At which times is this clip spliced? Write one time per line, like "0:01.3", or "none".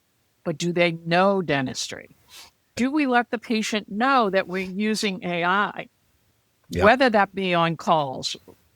0:02.7
0:06.6